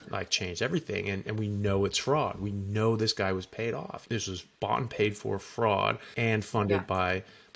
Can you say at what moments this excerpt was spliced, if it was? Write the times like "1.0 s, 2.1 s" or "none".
4.0 s, 6.1 s

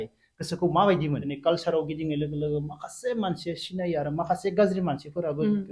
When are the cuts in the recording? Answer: 1.3 s

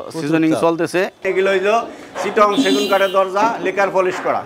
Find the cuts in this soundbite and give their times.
1.2 s

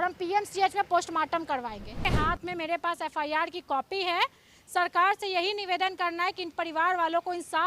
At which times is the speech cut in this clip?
2.1 s

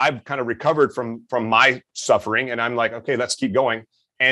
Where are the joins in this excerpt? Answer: none

